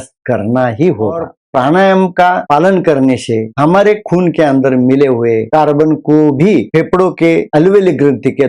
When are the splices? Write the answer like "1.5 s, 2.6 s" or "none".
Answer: 1.3 s